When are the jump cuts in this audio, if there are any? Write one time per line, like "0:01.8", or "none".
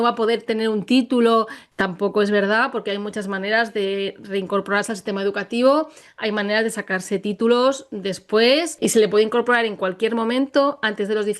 0:01.6
0:08.7